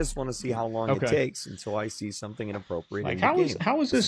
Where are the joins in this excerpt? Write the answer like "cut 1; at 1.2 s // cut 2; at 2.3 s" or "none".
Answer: none